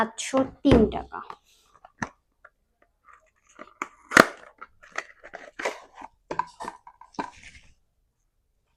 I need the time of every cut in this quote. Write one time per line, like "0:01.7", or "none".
none